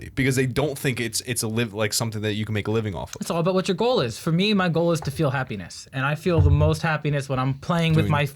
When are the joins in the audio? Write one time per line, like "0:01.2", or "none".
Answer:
none